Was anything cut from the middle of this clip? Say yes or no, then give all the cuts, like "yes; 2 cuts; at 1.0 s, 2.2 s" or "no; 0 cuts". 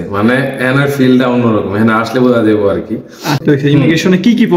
yes; 1 cut; at 3.4 s